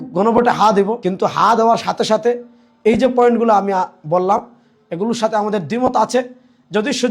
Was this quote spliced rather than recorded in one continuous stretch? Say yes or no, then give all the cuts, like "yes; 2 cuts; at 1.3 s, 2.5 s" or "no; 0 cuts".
yes; 1 cut; at 1.0 s